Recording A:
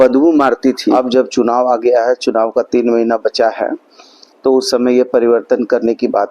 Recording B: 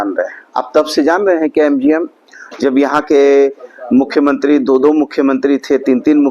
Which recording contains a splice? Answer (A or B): A